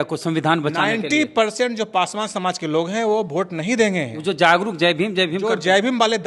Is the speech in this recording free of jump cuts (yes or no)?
yes